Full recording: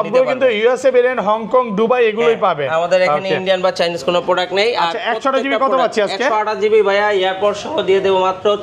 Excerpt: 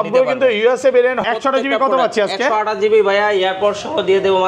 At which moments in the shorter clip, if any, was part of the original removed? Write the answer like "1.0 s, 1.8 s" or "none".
1.2 s